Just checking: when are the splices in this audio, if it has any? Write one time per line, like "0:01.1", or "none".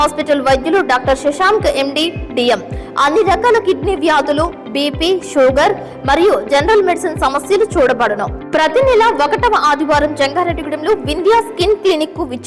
none